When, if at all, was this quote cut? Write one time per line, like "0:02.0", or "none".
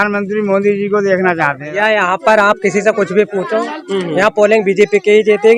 0:01.6